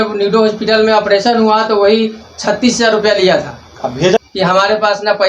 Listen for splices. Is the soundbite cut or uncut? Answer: cut